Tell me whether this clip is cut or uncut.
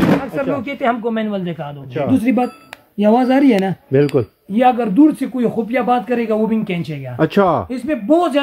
cut